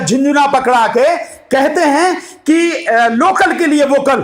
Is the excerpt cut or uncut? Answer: uncut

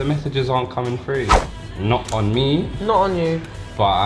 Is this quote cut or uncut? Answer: cut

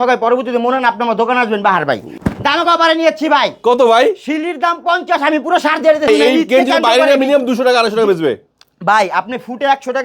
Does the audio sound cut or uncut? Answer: cut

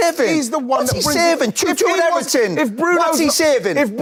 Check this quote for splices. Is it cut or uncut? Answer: uncut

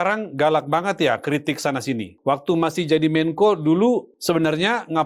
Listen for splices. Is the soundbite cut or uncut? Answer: cut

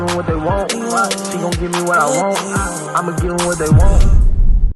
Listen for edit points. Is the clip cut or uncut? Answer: uncut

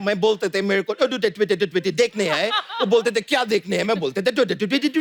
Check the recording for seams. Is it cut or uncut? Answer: uncut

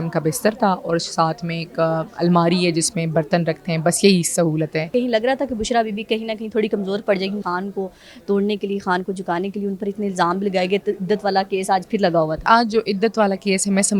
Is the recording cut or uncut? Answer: cut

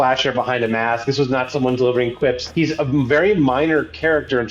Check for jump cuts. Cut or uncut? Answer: cut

